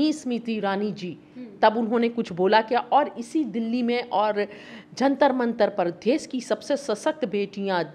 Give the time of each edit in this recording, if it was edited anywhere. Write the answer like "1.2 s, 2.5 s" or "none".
none